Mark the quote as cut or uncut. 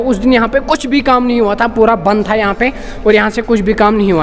uncut